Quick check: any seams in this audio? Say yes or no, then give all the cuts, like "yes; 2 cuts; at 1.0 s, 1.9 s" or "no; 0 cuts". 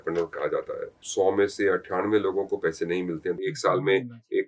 yes; 2 cuts; at 0.9 s, 3.4 s